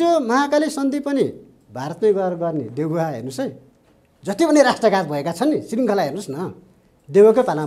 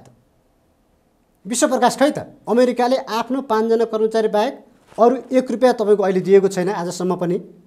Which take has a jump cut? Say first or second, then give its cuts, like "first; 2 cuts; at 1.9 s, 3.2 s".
second; 1 cut; at 2.3 s